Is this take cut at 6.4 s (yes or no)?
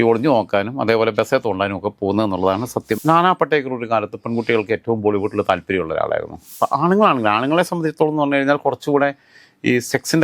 yes